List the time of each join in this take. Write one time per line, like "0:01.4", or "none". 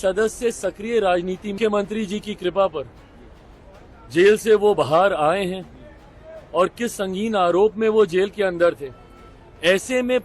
0:01.5